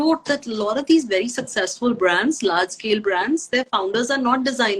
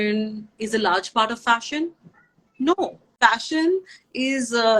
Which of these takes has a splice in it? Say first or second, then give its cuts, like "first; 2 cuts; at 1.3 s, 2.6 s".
second; 1 cut; at 3.0 s